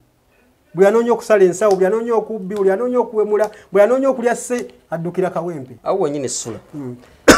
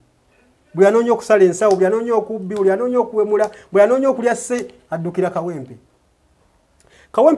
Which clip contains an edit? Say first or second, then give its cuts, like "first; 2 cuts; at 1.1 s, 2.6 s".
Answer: first; 1 cut; at 5.7 s